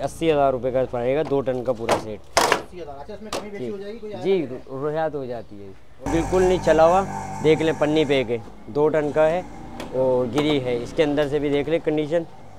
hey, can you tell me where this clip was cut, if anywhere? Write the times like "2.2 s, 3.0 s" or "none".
6.1 s